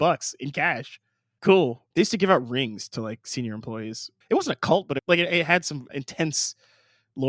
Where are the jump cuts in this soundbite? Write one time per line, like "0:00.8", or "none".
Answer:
0:01.8
0:04.1
0:05.0
0:05.9